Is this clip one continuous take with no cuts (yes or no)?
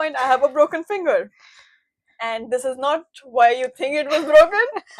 yes